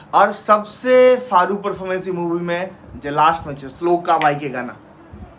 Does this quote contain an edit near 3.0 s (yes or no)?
no